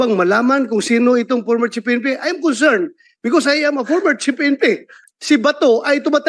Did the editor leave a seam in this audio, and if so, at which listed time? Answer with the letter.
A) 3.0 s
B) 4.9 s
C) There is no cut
B